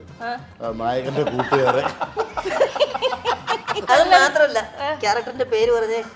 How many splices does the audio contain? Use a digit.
1